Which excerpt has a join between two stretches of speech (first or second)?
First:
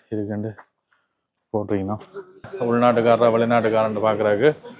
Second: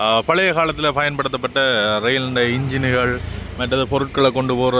first